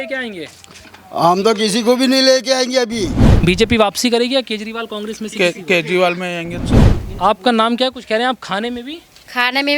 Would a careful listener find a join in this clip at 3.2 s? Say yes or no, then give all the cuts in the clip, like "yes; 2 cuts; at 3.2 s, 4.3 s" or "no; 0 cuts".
yes; 2 cuts; at 3.2 s, 6.9 s